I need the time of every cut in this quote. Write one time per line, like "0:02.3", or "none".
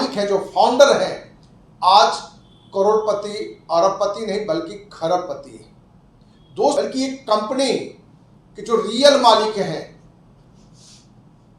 0:06.8